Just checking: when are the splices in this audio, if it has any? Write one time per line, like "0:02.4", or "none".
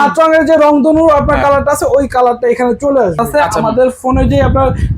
0:03.2